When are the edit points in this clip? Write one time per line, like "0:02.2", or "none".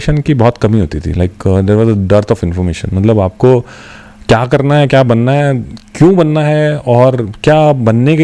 none